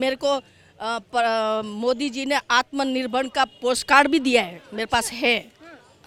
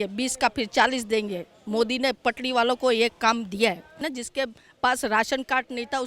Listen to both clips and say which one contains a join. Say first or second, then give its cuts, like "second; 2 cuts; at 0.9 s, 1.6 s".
second; 1 cut; at 4.0 s